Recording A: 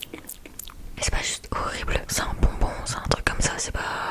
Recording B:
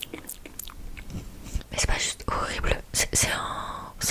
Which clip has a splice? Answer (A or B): A